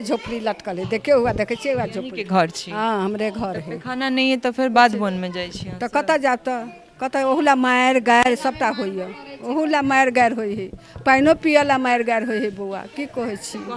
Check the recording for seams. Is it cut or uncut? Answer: uncut